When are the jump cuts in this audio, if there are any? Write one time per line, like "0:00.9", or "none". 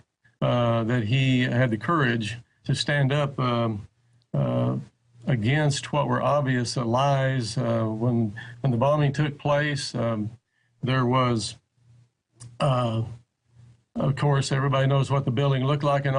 none